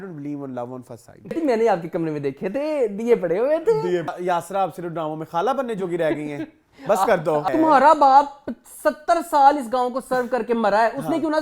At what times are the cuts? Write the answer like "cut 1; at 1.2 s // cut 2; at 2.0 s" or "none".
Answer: cut 1; at 1.3 s // cut 2; at 4.1 s // cut 3; at 7.5 s